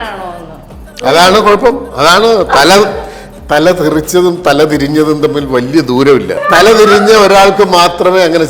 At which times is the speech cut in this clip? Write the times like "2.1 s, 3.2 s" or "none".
6.4 s